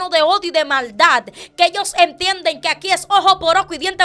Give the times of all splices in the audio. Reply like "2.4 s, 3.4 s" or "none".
none